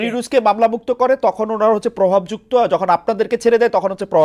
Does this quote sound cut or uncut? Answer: uncut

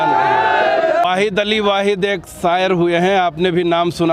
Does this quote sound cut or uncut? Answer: cut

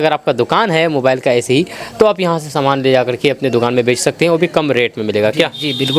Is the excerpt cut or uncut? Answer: uncut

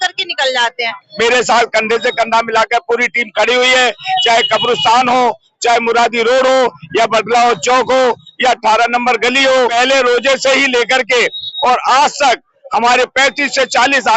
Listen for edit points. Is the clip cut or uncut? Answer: cut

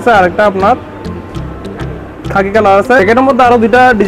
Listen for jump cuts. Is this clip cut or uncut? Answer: cut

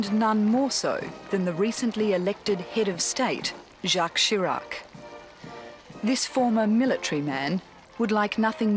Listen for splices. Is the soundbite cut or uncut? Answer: cut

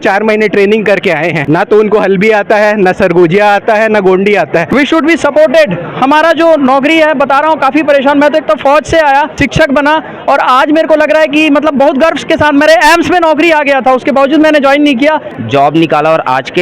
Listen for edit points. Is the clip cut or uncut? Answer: cut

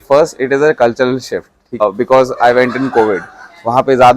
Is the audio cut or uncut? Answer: cut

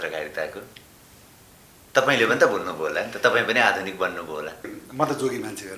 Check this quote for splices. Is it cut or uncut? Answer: cut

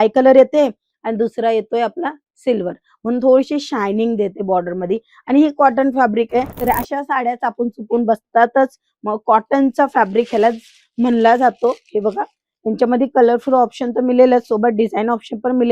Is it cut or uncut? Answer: cut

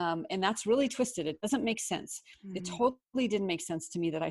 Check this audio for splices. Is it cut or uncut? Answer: cut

